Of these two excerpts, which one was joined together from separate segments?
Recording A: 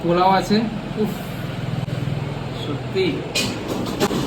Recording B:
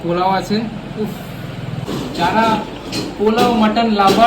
B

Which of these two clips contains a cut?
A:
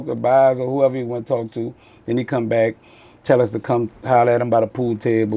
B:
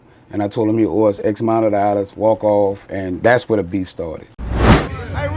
B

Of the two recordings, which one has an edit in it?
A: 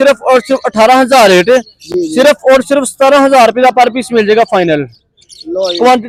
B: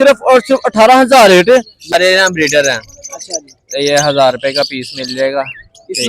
B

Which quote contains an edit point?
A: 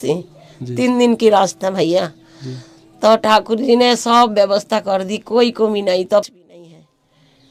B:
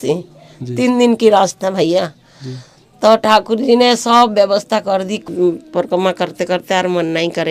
B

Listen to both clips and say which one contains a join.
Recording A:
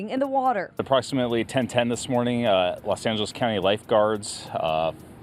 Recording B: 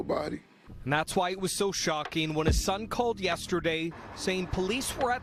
A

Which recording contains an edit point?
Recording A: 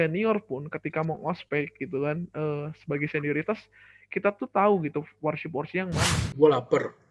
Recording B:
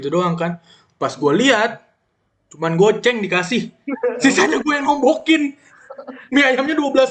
A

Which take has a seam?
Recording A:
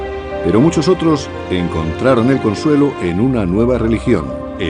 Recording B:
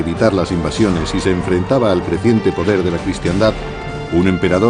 A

